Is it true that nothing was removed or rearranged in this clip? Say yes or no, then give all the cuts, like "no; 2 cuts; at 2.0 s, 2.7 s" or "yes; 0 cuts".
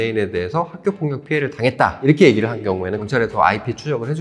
no; 1 cut; at 3.1 s